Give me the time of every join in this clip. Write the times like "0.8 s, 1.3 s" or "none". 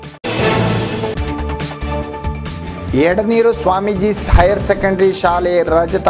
2.4 s